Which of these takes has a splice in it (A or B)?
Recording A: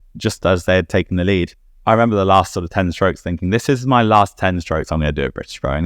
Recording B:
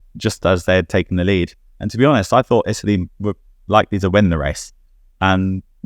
A